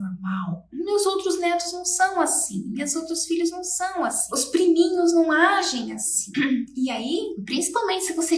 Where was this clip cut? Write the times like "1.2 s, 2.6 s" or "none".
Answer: none